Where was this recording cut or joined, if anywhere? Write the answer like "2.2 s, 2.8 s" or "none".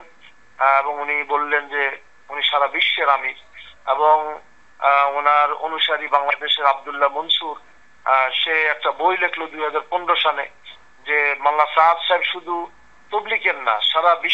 none